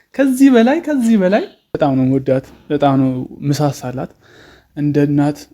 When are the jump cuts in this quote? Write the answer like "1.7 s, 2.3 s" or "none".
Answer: 1.8 s